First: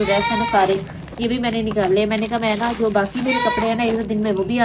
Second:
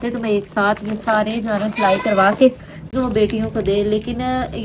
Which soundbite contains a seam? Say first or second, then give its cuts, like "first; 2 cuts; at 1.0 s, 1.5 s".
second; 1 cut; at 2.8 s